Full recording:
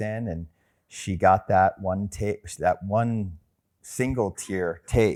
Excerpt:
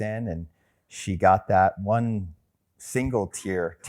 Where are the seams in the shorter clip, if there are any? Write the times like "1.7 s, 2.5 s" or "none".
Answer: 1.8 s